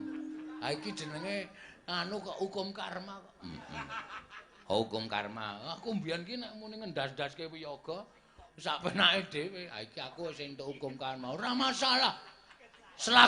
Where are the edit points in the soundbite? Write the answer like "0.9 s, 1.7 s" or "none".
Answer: none